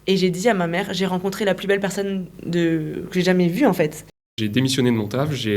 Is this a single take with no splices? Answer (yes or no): no